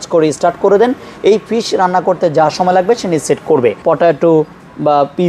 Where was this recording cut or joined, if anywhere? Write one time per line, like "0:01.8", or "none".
0:03.8